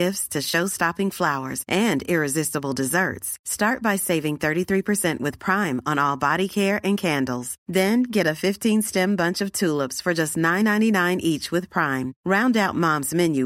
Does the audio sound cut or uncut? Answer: uncut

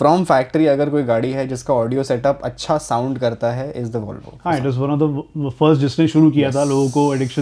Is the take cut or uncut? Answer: uncut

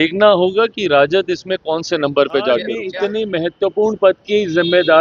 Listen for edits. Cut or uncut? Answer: cut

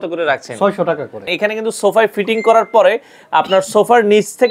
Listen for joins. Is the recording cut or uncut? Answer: cut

